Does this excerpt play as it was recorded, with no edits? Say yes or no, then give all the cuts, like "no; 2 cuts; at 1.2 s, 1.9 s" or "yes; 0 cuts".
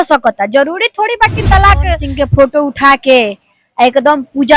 no; 1 cut; at 2.0 s